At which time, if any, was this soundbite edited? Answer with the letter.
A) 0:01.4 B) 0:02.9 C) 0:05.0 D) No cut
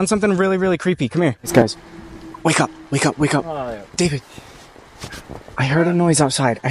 A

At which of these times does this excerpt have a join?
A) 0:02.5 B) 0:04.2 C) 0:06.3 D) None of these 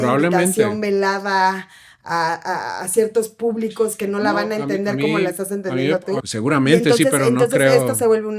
C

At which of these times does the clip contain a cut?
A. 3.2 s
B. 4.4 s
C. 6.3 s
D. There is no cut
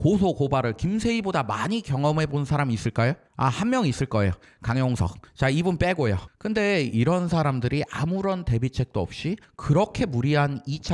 C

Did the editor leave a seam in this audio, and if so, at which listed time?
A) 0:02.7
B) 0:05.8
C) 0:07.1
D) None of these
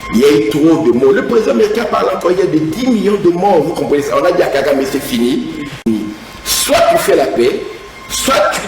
B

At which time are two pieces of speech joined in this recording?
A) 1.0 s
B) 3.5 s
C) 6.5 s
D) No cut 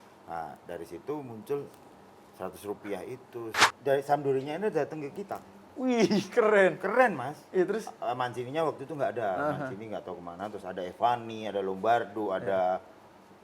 B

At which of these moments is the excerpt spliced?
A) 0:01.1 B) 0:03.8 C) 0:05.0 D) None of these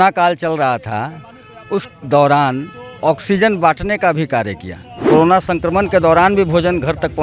C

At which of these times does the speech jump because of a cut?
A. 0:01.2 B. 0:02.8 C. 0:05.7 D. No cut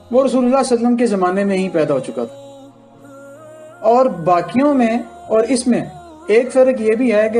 D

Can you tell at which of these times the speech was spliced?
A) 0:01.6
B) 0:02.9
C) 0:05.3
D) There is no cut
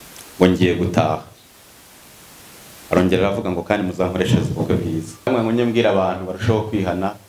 C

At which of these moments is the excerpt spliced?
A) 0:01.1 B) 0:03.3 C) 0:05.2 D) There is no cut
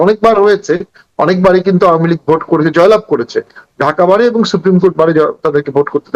D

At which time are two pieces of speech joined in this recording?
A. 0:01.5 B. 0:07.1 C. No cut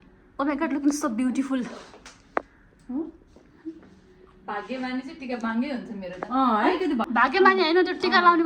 B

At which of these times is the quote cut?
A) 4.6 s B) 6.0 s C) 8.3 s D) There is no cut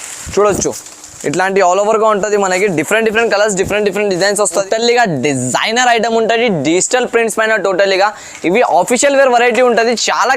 A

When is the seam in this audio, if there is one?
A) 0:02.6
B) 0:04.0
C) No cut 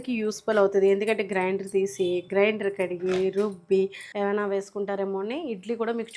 B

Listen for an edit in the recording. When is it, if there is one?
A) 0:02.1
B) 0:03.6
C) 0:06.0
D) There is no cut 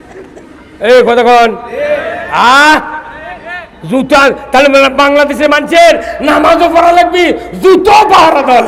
D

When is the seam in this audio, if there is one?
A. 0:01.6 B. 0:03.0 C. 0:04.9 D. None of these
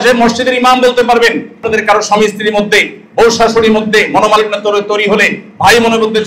A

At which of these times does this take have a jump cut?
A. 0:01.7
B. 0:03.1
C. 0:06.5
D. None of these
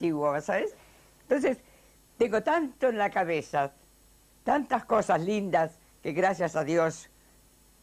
B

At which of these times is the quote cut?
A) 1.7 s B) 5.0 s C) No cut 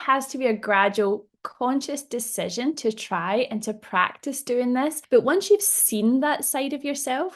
B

